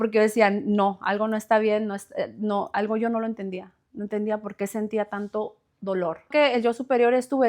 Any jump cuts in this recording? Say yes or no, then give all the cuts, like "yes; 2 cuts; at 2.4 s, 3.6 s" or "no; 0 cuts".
yes; 1 cut; at 6.3 s